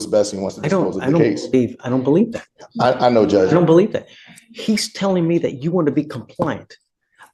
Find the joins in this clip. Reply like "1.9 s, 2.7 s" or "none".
none